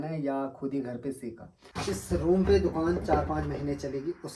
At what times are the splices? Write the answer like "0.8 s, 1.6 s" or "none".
1.7 s